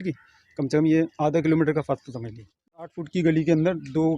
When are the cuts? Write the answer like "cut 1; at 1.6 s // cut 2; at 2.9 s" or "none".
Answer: cut 1; at 3.0 s